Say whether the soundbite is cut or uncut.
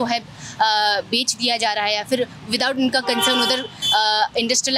uncut